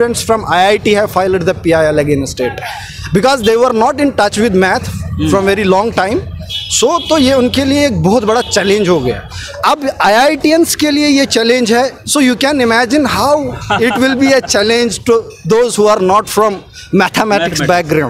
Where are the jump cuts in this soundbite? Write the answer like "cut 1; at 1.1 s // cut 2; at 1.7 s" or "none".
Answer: none